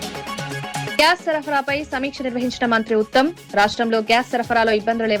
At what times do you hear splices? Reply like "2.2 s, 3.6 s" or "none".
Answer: 0.9 s